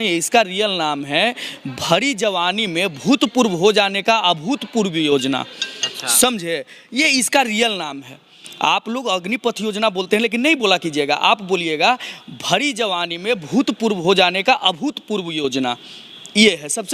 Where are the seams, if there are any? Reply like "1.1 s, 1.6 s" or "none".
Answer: none